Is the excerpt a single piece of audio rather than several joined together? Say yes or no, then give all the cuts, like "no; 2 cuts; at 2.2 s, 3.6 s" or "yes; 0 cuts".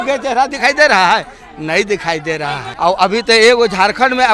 no; 1 cut; at 2.7 s